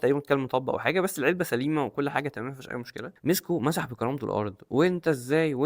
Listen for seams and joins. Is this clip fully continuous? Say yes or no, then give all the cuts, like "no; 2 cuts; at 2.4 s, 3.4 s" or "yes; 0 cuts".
no; 1 cut; at 3.0 s